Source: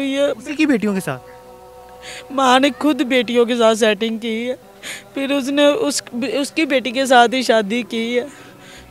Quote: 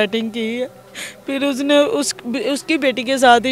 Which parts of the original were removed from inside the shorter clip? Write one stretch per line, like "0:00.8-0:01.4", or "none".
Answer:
none